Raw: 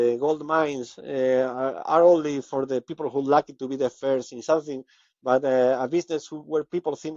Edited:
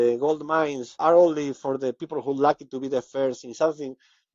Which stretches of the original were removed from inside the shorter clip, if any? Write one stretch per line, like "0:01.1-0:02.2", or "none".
0:00.9-0:01.8